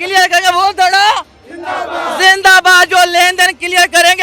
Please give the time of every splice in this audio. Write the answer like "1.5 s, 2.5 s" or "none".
none